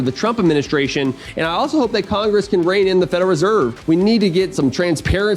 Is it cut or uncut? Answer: cut